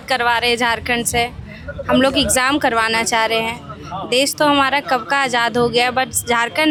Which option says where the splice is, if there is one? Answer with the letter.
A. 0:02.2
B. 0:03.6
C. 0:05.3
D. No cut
D